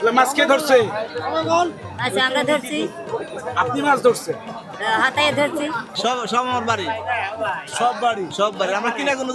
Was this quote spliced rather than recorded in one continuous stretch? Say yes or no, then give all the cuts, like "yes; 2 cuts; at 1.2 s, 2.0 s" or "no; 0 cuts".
yes; 1 cut; at 5.9 s